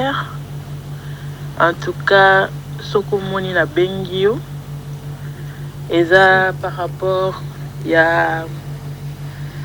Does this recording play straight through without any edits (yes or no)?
yes